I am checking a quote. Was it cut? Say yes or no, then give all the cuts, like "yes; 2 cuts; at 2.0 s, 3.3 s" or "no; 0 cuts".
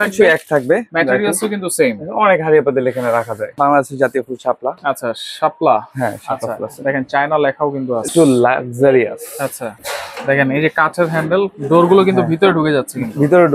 yes; 3 cuts; at 3.5 s, 8.1 s, 9.8 s